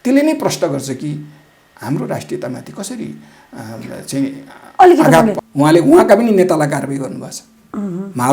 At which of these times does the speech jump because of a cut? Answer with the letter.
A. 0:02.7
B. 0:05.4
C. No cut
B